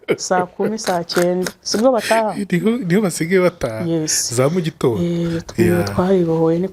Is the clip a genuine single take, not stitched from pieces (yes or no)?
yes